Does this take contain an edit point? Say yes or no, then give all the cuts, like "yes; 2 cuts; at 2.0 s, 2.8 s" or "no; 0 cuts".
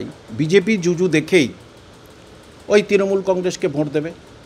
no; 0 cuts